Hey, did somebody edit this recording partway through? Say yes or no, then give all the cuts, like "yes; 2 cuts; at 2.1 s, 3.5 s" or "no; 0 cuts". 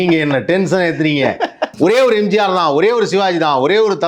yes; 1 cut; at 1.6 s